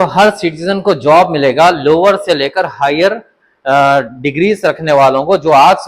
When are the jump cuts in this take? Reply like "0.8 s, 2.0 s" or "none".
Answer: none